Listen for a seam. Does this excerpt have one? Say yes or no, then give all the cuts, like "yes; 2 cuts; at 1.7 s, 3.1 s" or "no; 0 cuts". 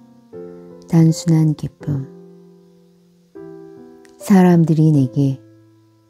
no; 0 cuts